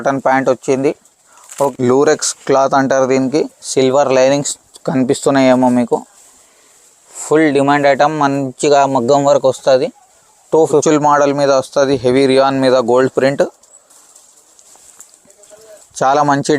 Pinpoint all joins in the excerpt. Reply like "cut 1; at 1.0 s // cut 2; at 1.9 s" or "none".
cut 1; at 1.7 s // cut 2; at 10.8 s

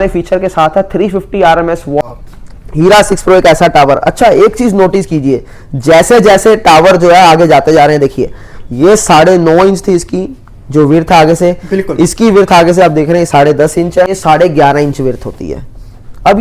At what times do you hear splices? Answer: cut 1; at 2.0 s // cut 2; at 14.2 s

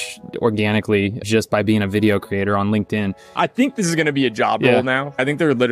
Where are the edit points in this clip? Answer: cut 1; at 3.3 s

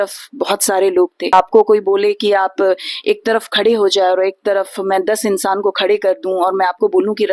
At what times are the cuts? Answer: cut 1; at 1.3 s

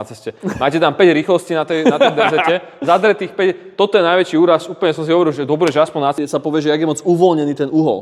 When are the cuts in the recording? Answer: cut 1; at 6.2 s

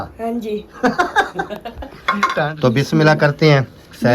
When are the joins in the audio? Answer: cut 1; at 2.5 s

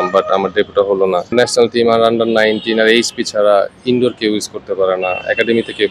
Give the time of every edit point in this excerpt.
cut 1; at 1.3 s

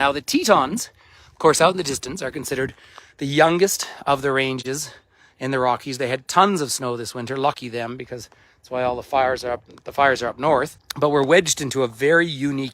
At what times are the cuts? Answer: cut 1; at 10.8 s

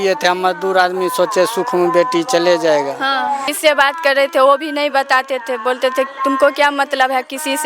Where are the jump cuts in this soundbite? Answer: cut 1; at 3.4 s

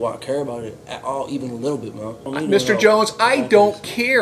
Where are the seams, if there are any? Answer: cut 1; at 2.3 s

